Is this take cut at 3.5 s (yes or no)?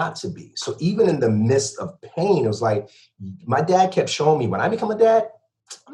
no